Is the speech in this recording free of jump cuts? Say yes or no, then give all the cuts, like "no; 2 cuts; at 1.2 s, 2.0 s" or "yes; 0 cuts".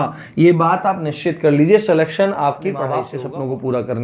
no; 1 cut; at 3.1 s